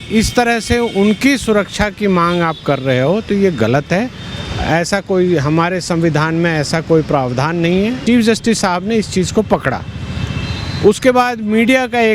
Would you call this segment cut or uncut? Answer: cut